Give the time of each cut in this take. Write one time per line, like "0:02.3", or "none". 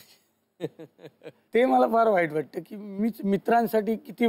0:01.3

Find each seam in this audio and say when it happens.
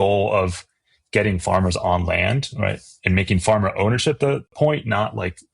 0:04.5

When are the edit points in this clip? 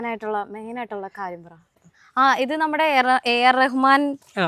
0:01.8

